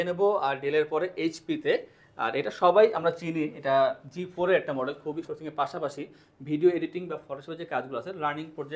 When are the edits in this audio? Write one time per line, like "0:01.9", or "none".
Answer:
0:05.3